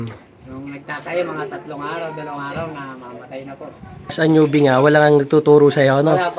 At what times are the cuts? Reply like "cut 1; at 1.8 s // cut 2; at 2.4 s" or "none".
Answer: cut 1; at 4.2 s